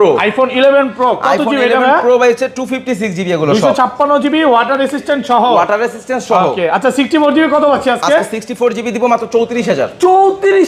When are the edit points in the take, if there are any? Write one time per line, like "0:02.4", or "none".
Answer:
none